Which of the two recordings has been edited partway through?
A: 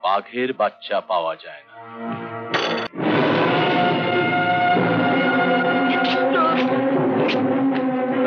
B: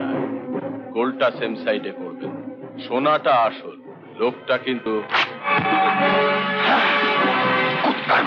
A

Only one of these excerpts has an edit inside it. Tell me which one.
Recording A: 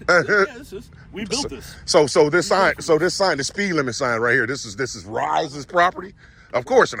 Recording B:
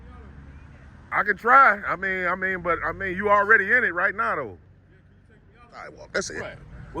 B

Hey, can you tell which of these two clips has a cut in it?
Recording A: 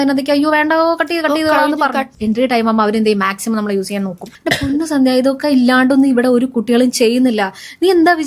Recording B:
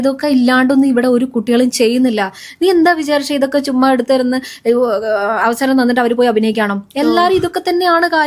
A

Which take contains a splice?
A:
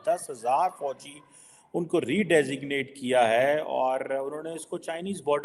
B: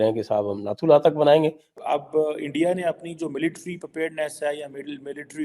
B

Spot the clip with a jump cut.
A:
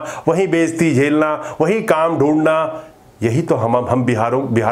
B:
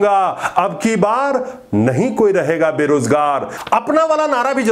B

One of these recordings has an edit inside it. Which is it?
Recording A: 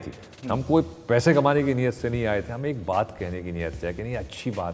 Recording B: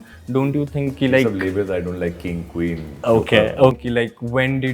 B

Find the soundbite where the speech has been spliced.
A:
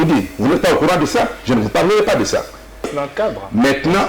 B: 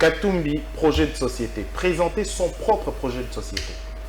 A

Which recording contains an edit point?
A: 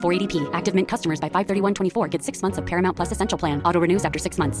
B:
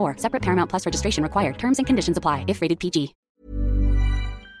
B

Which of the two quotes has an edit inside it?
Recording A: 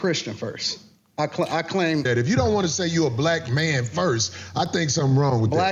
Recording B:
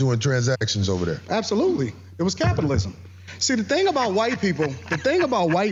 A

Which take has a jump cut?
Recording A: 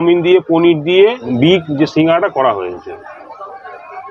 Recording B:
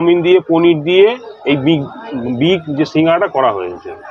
A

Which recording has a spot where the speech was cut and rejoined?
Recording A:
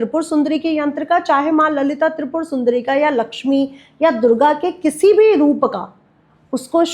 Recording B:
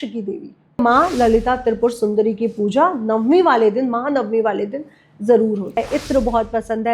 B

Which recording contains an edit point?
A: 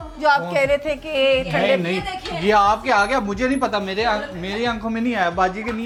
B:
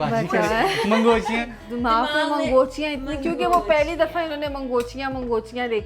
B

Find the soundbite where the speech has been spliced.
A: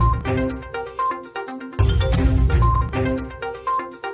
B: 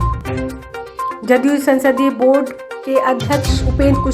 B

